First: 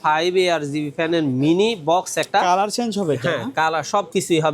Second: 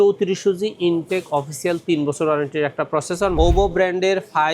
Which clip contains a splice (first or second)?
second